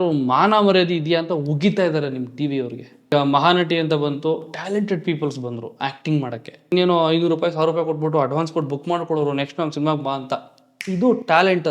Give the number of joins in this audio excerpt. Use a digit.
2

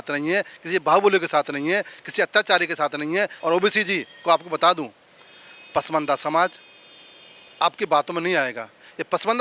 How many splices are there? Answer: 0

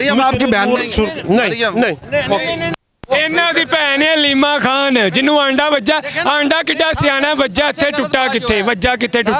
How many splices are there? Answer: 0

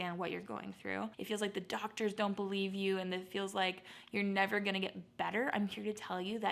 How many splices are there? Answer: 1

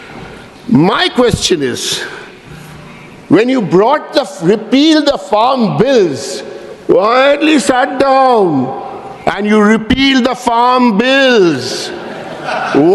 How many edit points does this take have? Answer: 0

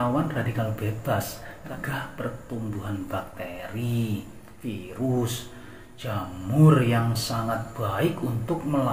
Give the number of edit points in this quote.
1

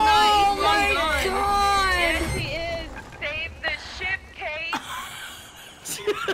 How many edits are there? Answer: 1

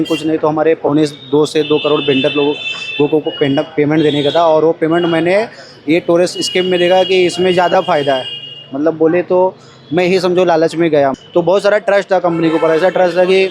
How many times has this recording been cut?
1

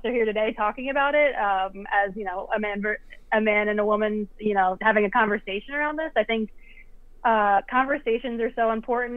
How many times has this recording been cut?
0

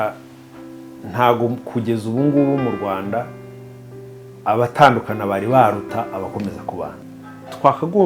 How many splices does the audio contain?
1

